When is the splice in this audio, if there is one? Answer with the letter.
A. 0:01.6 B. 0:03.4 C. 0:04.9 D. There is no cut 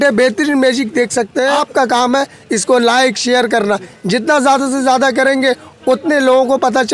A